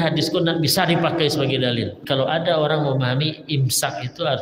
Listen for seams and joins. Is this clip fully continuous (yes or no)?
no